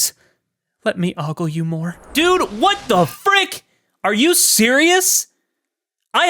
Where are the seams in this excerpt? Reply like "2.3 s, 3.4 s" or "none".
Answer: 2.0 s